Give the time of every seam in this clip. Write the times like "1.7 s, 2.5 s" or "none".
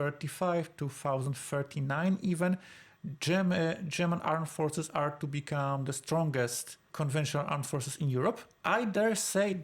8.5 s